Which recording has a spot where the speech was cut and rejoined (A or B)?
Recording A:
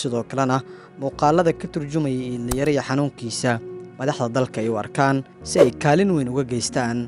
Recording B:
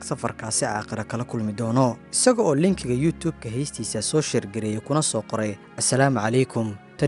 B